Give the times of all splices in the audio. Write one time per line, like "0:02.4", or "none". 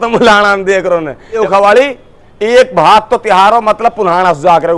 0:01.4